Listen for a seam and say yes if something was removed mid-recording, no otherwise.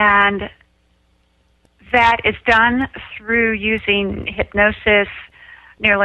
yes